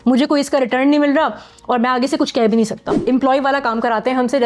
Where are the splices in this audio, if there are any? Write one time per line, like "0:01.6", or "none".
0:03.0